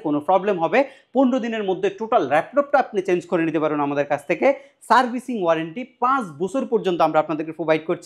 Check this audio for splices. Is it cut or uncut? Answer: uncut